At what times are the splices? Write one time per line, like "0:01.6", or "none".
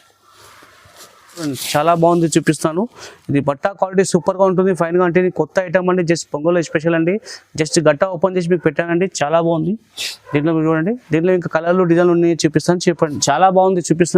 0:01.6
0:13.2